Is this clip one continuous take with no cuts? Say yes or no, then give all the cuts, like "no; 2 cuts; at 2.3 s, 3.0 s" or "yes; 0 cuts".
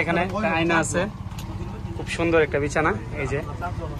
yes; 0 cuts